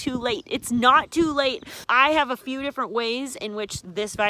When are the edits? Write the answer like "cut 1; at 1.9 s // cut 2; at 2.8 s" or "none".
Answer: cut 1; at 1.8 s